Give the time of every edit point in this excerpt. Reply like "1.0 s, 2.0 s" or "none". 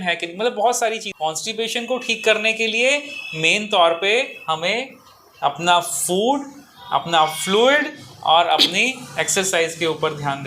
1.1 s